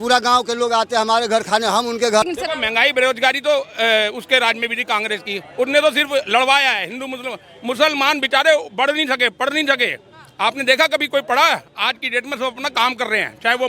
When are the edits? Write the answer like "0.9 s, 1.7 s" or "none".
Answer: 2.2 s